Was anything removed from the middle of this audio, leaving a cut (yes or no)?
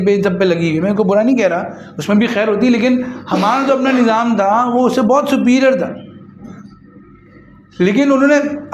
no